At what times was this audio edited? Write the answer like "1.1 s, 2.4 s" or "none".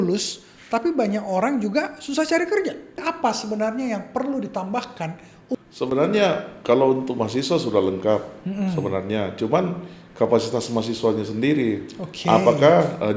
3.0 s, 5.5 s